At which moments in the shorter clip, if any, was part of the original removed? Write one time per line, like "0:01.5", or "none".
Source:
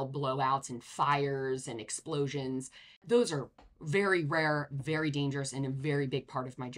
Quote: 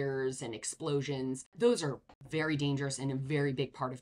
0:01.5
0:02.2